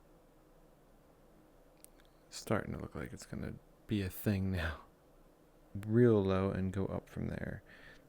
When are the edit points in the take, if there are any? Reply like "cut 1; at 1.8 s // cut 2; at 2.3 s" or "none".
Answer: cut 1; at 5.7 s